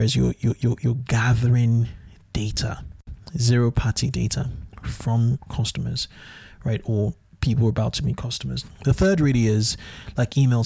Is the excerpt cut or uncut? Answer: cut